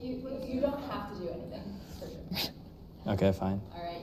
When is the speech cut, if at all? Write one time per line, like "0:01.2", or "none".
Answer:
none